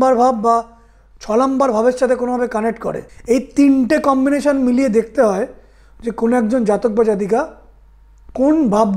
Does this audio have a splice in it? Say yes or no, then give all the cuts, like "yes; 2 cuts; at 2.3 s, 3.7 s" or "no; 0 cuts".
yes; 1 cut; at 3.1 s